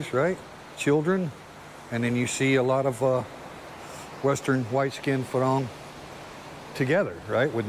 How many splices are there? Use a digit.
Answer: 0